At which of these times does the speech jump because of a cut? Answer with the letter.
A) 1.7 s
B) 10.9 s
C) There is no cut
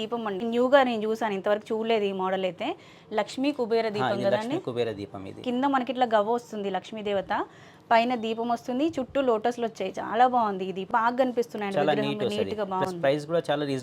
B